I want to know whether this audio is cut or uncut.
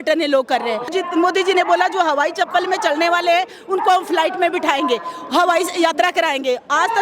cut